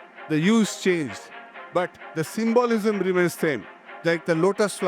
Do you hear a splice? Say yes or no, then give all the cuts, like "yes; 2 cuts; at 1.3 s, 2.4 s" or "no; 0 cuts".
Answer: yes; 1 cut; at 3.9 s